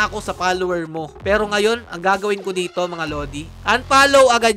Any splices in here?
yes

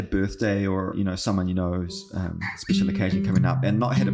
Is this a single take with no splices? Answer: no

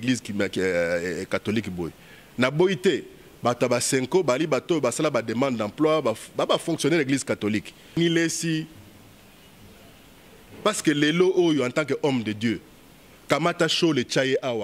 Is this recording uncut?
no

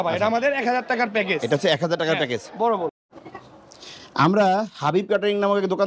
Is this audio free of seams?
no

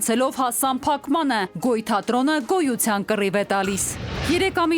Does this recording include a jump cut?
no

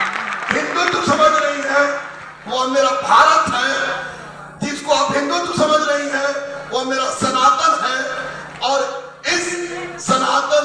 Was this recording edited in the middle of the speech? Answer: no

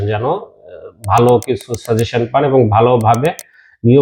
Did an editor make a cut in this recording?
no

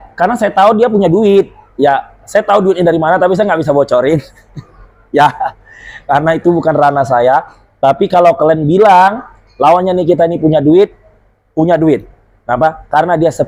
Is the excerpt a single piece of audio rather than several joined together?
yes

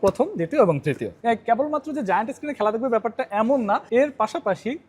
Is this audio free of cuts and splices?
no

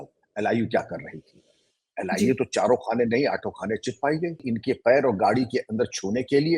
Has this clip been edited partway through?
yes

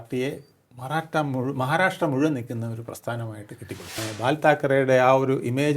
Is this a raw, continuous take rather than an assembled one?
no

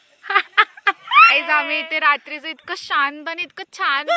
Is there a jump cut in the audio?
yes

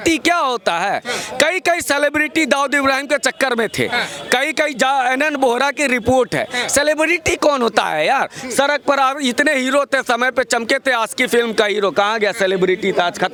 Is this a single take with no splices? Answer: yes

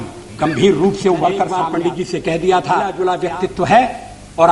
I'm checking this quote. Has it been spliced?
yes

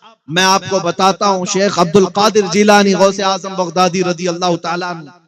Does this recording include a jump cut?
no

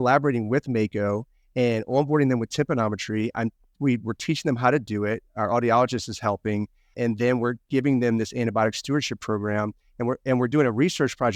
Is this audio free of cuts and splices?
yes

